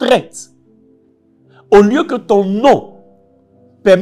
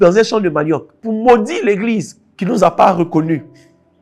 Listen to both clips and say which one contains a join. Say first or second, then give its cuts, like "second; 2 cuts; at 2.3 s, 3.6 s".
second; 1 cut; at 0.9 s